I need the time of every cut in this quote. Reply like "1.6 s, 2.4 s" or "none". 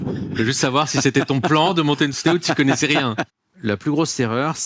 3.3 s